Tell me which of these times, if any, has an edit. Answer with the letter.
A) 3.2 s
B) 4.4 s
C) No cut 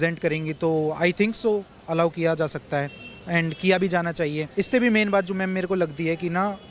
B